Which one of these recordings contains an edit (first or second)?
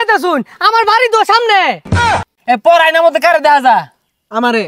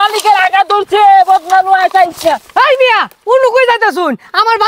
first